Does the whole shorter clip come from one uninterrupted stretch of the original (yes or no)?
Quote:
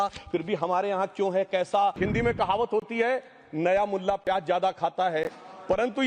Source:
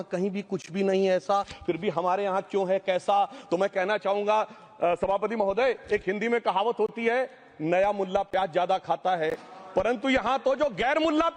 no